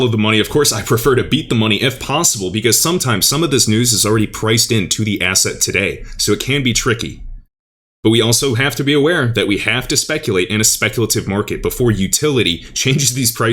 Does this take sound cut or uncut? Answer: uncut